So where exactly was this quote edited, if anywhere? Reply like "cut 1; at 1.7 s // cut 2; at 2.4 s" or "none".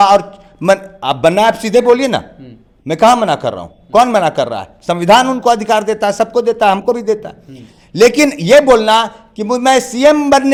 none